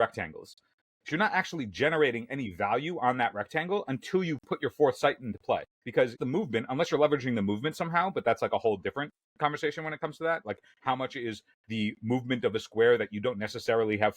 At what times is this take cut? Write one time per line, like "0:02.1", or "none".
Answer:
0:06.1